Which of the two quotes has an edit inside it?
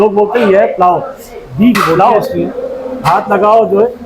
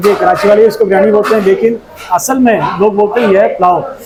first; 1 cut; at 2.2 s

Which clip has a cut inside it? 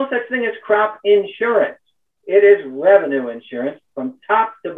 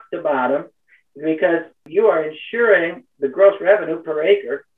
second; 1 cut; at 1.8 s

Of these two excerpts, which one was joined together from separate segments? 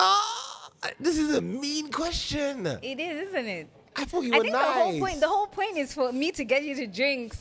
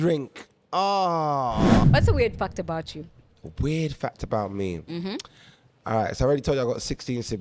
second; 1 cut; at 1.8 s

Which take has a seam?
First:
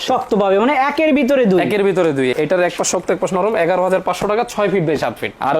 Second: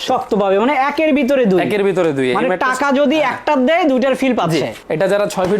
first; 1 cut; at 2.3 s

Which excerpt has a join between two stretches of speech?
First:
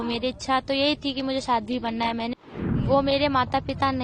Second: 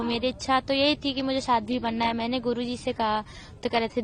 first; 1 cut; at 2.4 s

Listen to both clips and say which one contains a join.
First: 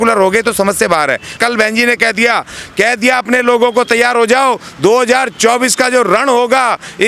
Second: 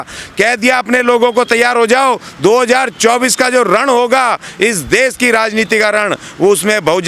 first; 1 cut; at 1.4 s

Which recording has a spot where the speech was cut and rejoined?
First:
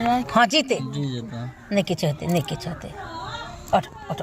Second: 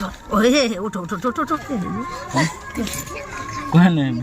second; 1 cut; at 1.5 s

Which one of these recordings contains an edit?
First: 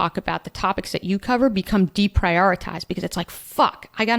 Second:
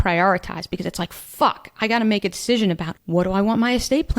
second; 1 cut; at 2.9 s

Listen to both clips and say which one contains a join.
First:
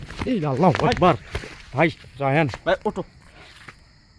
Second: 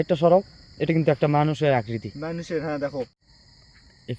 second; 1 cut; at 3.1 s

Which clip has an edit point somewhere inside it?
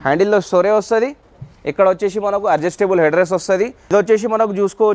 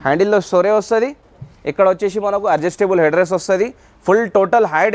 first; 1 cut; at 3.8 s

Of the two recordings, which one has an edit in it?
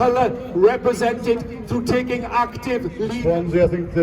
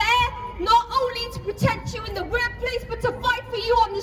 first; 1 cut; at 3.1 s

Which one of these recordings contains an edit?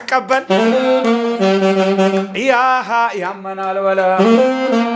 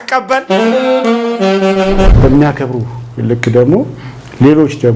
second; 1 cut; at 2.1 s

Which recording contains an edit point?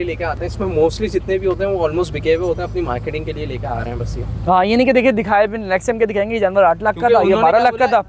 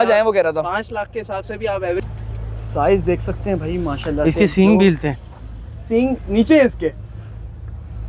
second; 1 cut; at 2.1 s

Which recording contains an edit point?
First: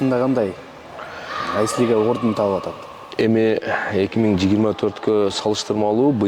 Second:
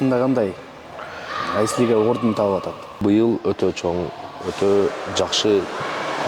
second; 1 cut; at 3.0 s

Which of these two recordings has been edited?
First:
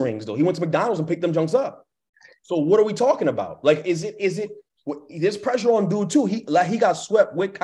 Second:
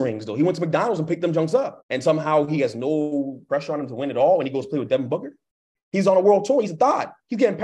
second; 1 cut; at 1.8 s

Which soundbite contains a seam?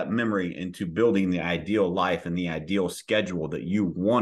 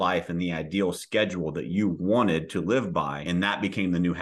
second; 1 cut; at 3.2 s

